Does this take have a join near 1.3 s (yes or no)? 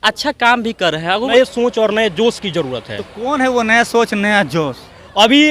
yes